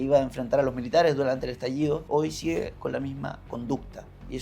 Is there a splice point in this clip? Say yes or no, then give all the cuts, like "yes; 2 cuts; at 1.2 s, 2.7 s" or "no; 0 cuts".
yes; 1 cut; at 2.0 s